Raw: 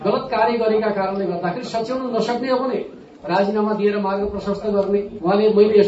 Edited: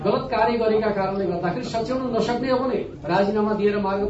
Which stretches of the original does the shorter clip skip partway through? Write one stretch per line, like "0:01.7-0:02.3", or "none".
0:02.9-0:03.1